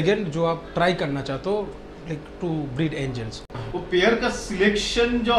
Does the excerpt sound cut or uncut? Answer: cut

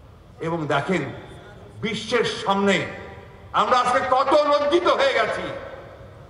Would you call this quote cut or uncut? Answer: uncut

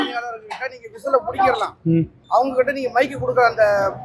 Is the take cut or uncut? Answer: cut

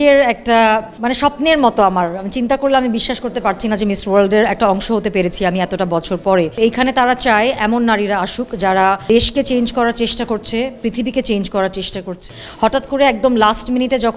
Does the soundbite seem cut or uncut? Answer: cut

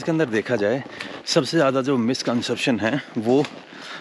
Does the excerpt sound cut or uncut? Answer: uncut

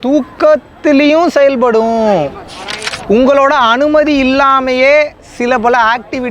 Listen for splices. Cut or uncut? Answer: cut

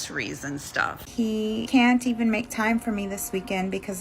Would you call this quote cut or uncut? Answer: cut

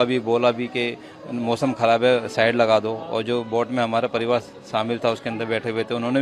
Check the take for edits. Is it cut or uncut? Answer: uncut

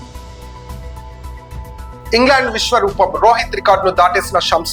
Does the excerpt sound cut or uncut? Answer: uncut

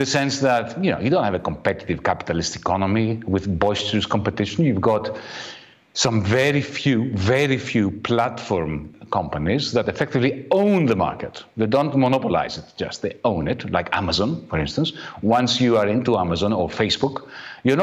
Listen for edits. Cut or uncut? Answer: uncut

